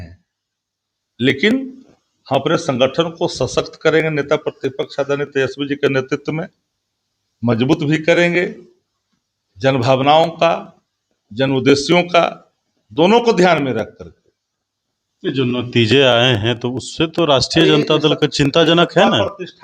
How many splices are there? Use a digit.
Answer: 0